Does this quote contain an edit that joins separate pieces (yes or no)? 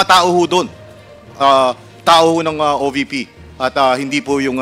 no